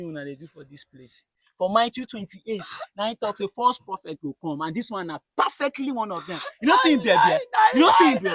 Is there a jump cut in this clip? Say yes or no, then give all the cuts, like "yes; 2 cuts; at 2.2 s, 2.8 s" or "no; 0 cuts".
yes; 1 cut; at 1.3 s